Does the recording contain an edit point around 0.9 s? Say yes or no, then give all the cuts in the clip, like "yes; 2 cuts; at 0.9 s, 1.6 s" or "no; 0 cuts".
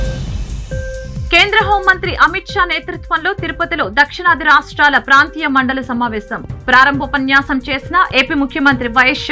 yes; 1 cut; at 0.9 s